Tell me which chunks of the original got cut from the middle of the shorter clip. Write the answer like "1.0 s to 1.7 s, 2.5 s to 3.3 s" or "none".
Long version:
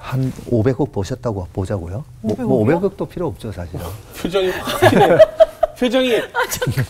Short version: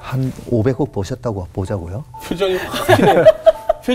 2.1 s to 4.0 s